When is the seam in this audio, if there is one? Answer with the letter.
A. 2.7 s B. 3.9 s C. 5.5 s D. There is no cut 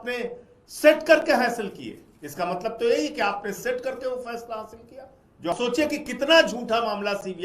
C